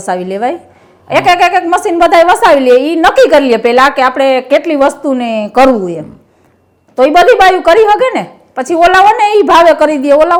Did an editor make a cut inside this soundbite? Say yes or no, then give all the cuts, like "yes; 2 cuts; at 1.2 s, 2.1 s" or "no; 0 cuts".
no; 0 cuts